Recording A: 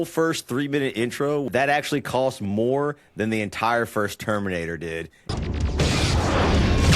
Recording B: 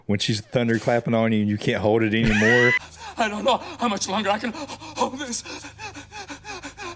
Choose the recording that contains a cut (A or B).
A